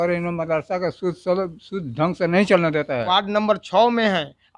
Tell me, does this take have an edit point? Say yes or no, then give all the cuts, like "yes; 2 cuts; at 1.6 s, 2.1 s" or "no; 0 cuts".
yes; 1 cut; at 3.1 s